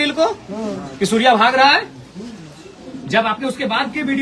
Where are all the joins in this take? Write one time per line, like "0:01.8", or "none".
none

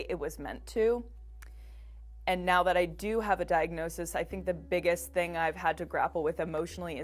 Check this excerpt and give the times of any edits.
none

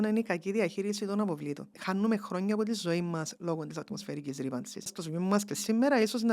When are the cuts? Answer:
0:01.7
0:05.0

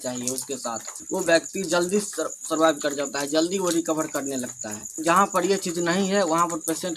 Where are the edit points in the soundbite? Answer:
0:00.9
0:05.0

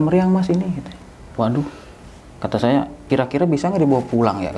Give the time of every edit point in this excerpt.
0:03.0

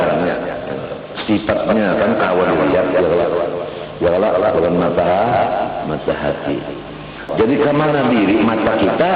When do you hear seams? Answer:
0:07.3

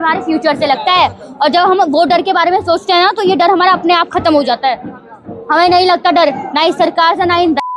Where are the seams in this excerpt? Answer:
none

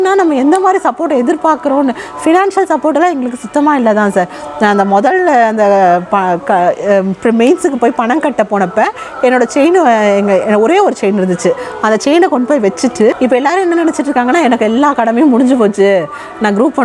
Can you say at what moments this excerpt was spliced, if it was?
0:13.2

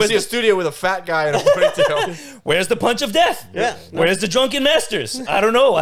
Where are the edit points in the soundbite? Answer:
none

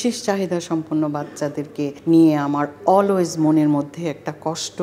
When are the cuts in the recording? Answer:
0:02.0

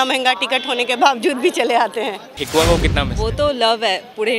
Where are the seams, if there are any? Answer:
0:02.3

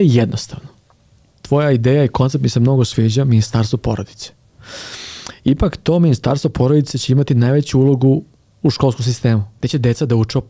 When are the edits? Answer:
0:08.4
0:09.5

